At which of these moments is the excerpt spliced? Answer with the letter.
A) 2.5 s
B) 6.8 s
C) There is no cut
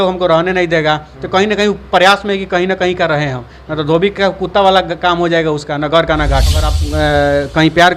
B